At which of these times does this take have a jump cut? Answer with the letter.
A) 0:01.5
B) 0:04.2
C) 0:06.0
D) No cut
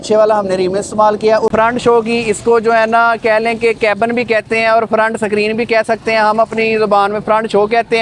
A